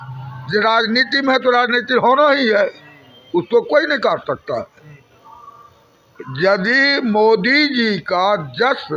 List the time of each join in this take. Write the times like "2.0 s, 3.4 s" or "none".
none